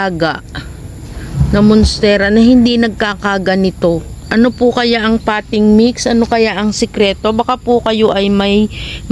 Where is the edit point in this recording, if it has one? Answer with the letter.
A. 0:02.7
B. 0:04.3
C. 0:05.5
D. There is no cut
B